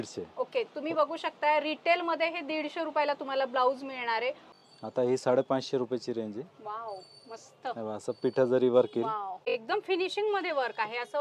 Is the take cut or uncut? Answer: cut